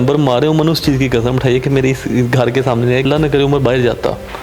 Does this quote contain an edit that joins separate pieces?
yes; 1 cut; at 3.0 s

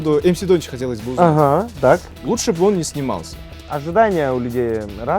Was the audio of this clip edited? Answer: yes; 2 cuts; at 2.1 s, 3.6 s

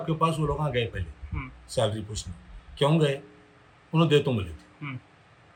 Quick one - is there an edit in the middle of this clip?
no; 0 cuts

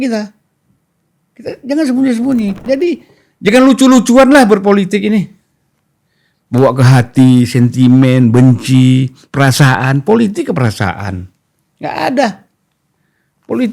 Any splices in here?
yes; 1 cut; at 2.6 s

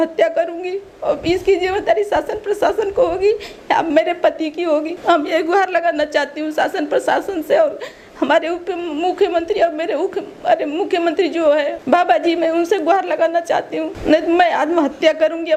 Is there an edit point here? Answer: no; 0 cuts

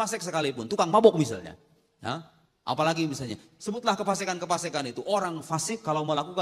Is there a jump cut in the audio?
no; 0 cuts

